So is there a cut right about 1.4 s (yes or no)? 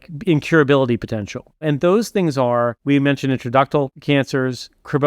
no